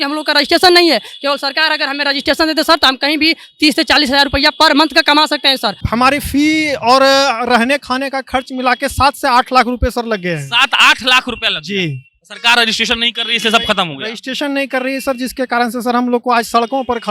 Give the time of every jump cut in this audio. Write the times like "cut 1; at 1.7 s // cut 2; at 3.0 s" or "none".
cut 1; at 5.8 s